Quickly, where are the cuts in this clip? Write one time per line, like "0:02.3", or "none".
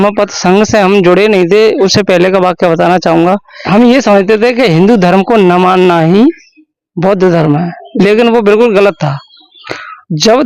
0:03.5